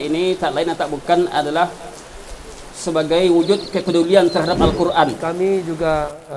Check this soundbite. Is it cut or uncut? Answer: cut